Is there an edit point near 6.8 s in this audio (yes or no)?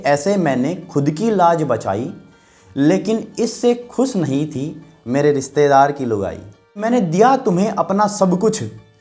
yes